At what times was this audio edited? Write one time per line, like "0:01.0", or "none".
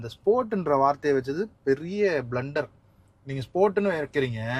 none